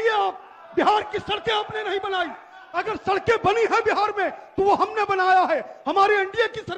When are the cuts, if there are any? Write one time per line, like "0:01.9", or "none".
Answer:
none